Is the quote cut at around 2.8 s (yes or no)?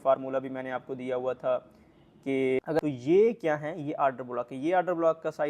yes